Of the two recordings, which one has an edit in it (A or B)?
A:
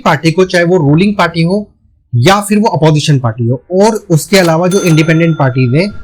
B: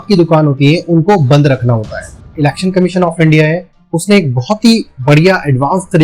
B